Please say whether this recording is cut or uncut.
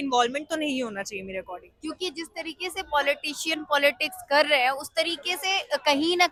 uncut